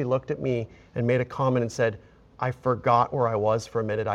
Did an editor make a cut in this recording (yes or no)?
no